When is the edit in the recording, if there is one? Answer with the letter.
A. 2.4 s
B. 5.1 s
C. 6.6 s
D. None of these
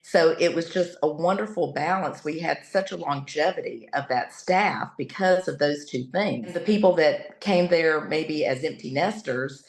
C